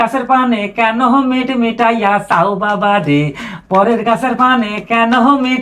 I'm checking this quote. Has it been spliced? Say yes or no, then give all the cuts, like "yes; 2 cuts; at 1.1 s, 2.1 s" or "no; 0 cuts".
no; 0 cuts